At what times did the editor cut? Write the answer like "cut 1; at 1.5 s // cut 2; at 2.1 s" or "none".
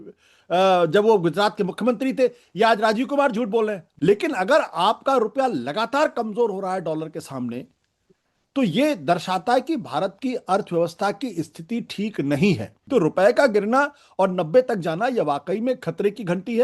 cut 1; at 3.8 s // cut 2; at 12.7 s